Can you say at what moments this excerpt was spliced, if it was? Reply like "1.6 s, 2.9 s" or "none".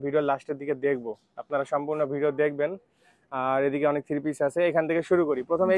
none